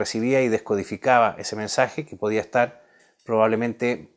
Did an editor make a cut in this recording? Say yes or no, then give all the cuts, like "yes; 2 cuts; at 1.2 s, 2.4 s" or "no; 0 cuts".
yes; 1 cut; at 0.9 s